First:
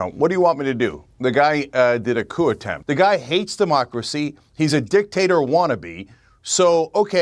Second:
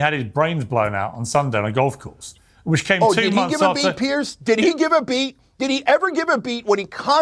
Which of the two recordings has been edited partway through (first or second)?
first